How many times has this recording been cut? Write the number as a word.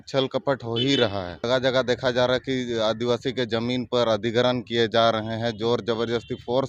one